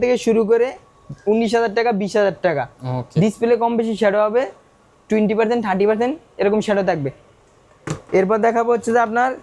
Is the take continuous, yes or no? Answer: yes